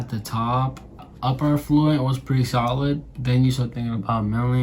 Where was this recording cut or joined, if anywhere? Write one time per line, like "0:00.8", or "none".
0:01.1

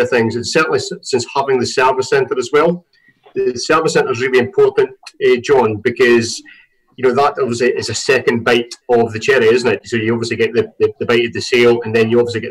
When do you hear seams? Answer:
none

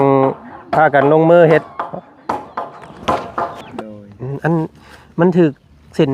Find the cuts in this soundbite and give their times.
0:03.7

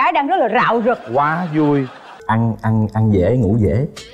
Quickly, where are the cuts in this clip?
0:02.0

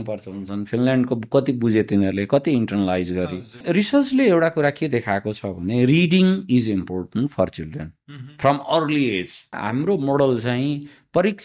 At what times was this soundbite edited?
0:03.6
0:09.6

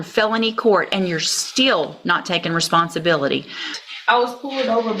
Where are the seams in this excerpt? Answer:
0:03.8

